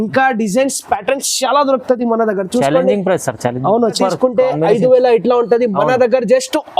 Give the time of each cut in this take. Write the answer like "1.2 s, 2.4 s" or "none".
4.0 s